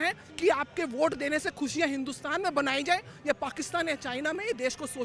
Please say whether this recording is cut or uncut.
uncut